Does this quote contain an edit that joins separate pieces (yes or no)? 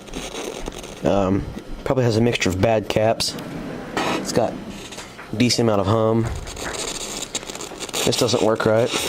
yes